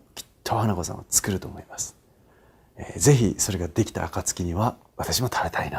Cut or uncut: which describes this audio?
cut